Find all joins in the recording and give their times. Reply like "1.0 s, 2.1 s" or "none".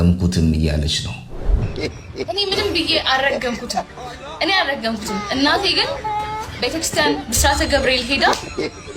1.7 s